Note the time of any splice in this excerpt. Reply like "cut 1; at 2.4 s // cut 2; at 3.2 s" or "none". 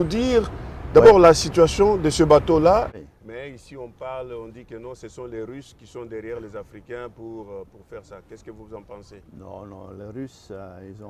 cut 1; at 2.9 s